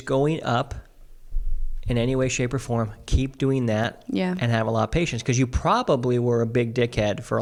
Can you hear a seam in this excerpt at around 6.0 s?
no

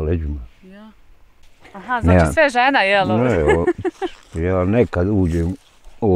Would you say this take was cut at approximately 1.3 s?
yes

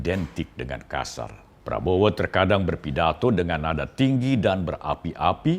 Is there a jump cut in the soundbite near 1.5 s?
yes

